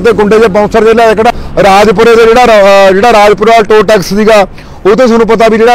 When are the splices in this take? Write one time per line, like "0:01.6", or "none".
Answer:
0:01.3